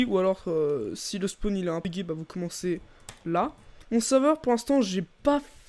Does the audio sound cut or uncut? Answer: cut